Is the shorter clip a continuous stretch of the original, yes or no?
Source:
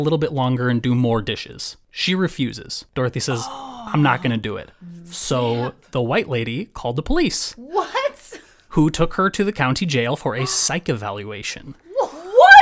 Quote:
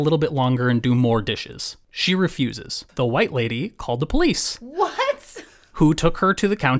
no